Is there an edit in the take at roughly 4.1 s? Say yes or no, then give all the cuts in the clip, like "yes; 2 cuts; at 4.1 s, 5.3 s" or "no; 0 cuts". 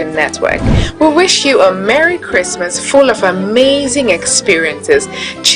yes; 1 cut; at 4.1 s